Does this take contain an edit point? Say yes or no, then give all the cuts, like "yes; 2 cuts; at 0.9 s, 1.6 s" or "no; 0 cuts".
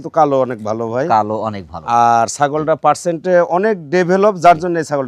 no; 0 cuts